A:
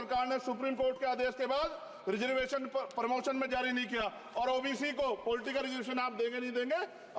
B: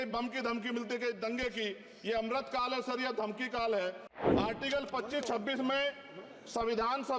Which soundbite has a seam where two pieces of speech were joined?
B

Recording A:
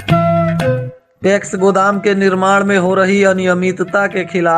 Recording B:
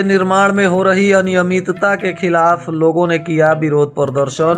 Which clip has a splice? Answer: A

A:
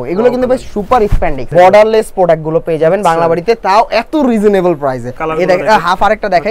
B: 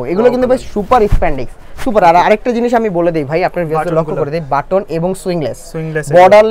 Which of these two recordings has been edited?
A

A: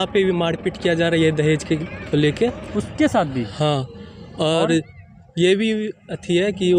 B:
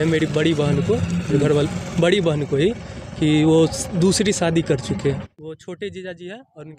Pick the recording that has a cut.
B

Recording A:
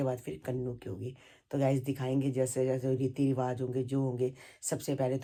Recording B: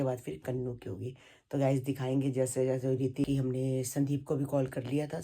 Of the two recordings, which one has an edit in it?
B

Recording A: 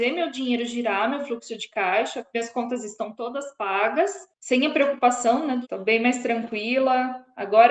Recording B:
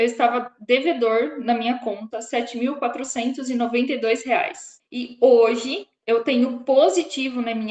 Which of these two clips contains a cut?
A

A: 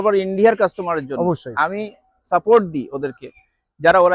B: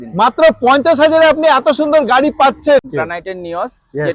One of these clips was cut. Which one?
B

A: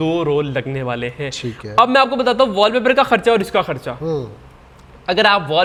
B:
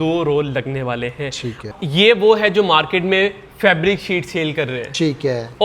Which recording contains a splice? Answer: B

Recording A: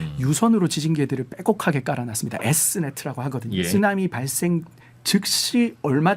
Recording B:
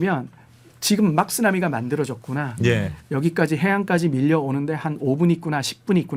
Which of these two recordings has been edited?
A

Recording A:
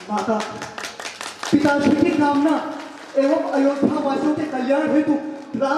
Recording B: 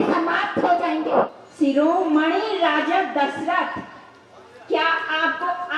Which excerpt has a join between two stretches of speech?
B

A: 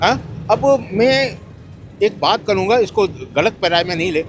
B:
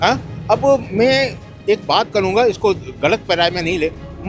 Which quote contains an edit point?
B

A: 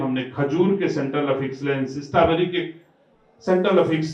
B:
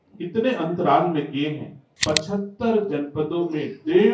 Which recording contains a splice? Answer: B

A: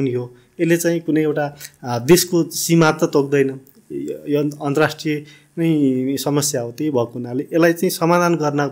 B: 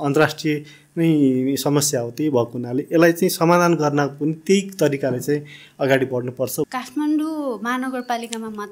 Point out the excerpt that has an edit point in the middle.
B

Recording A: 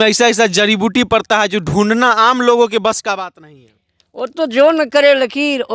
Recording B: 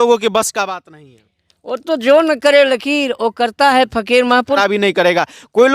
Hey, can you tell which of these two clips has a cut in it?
B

